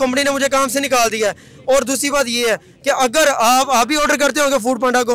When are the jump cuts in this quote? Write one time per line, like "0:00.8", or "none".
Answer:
none